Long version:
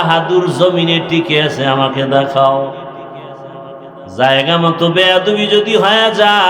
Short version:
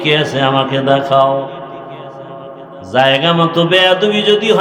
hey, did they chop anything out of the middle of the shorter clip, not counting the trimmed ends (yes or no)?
no